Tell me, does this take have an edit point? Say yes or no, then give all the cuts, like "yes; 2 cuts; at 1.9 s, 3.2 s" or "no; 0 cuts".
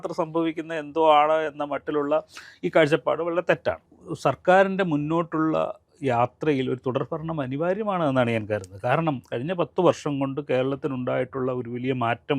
yes; 1 cut; at 3.9 s